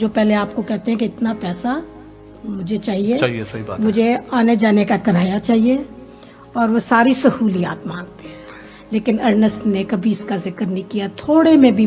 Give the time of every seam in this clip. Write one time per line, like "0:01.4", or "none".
none